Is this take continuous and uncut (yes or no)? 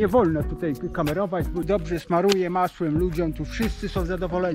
no